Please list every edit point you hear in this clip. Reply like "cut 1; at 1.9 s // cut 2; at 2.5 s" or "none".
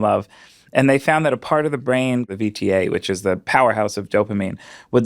cut 1; at 2.3 s